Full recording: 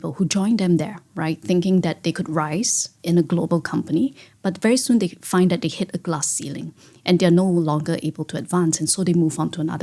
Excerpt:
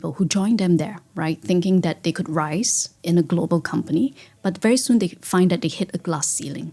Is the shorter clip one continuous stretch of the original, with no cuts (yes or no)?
yes